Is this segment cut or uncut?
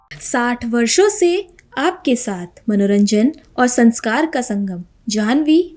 uncut